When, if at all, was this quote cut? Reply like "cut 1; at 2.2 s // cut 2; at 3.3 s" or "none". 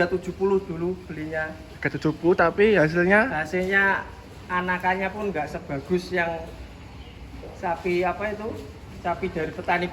none